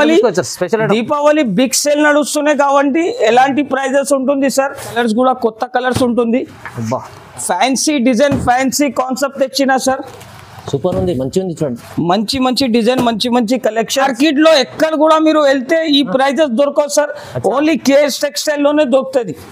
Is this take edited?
yes; 2 cuts; at 4.9 s, 14.1 s

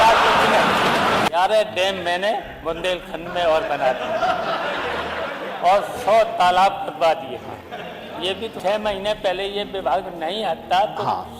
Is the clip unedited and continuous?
no; 2 cuts; at 1.3 s, 8.5 s

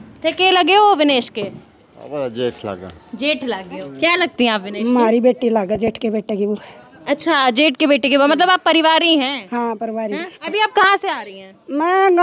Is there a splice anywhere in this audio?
yes; 2 cuts; at 3.9 s, 10.4 s

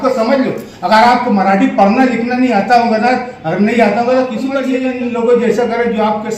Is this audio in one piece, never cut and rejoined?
no; 1 cut; at 4.6 s

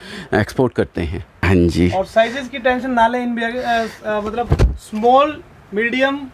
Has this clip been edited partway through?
yes; 1 cut; at 1.3 s

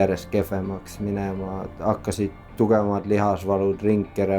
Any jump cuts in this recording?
yes; 1 cut; at 2.4 s

